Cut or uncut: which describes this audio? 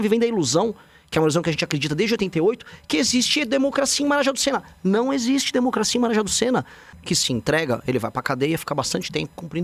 cut